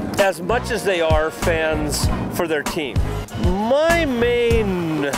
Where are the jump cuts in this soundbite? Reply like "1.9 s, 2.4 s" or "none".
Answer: 3.1 s